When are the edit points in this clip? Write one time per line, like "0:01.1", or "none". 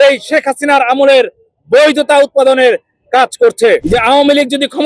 0:03.8